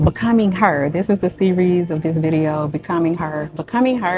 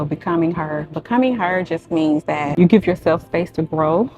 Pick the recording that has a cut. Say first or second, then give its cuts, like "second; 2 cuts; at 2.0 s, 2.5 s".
second; 1 cut; at 2.5 s